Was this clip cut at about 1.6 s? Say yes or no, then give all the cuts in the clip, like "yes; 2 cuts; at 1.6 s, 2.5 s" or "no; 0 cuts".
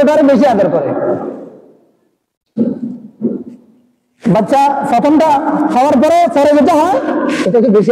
no; 0 cuts